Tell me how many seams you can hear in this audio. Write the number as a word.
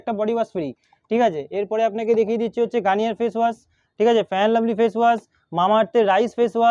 zero